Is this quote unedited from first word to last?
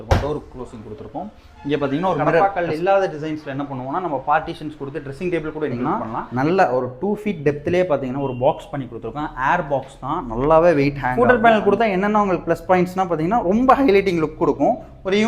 no; 3 cuts; at 2.4 s, 5.8 s, 11.0 s

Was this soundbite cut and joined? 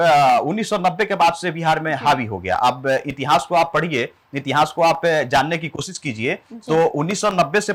no; 0 cuts

